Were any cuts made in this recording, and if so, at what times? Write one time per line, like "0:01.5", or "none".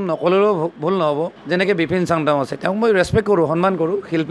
0:01.4